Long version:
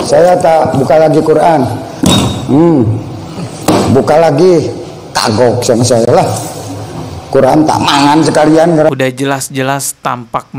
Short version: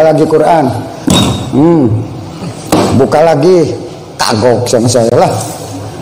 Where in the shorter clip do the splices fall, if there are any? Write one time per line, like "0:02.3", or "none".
none